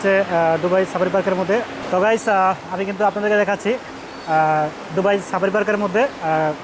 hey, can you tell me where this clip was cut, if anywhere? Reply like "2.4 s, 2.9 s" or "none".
1.8 s